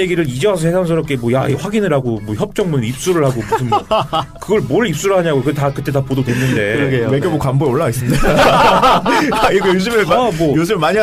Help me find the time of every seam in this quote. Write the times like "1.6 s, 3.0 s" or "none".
none